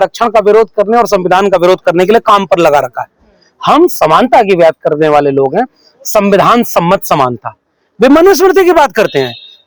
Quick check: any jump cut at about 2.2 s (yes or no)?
no